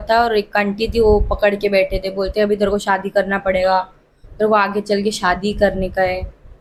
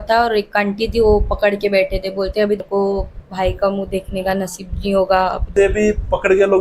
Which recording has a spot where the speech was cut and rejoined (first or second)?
second